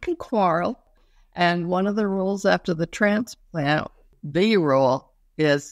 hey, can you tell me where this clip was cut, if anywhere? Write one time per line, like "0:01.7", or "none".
0:01.0
0:04.1